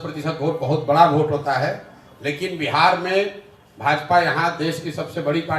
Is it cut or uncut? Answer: uncut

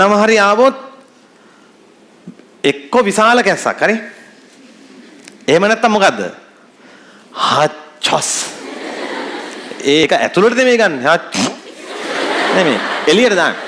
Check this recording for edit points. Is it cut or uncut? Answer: cut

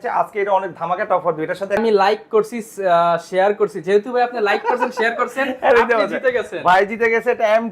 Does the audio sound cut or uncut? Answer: cut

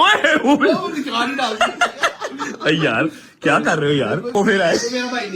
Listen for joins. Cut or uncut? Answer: cut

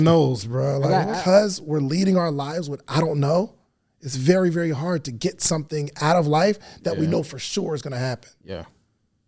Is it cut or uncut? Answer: cut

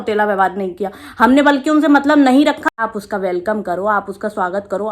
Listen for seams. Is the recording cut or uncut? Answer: cut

